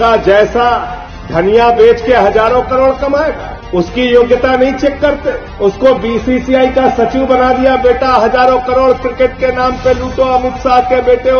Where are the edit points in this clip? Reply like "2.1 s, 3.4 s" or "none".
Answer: none